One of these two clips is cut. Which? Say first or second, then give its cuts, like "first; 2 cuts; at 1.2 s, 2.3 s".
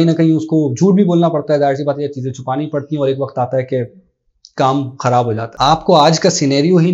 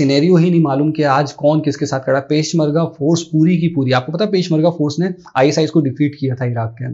first; 1 cut; at 5.5 s